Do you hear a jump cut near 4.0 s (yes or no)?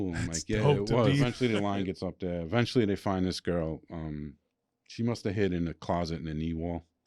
no